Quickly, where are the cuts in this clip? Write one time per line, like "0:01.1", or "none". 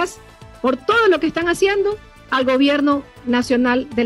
none